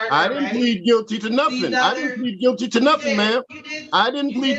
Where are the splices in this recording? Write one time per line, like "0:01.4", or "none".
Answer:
none